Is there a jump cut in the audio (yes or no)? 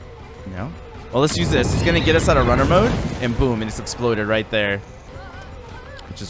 yes